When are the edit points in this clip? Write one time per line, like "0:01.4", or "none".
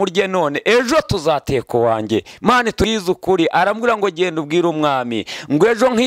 0:02.9